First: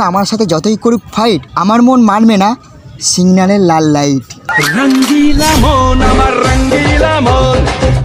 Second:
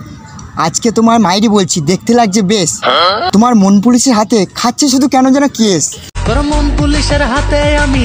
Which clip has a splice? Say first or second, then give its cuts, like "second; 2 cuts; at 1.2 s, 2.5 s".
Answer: second; 1 cut; at 3.2 s